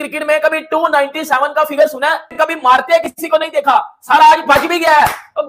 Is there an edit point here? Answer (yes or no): no